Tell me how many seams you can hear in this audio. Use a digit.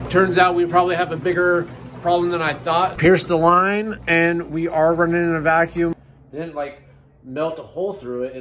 2